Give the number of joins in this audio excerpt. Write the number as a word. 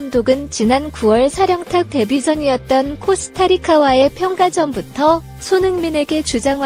zero